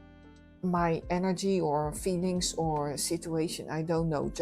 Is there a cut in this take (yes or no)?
no